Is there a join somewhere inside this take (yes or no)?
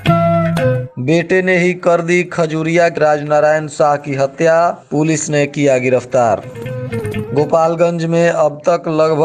yes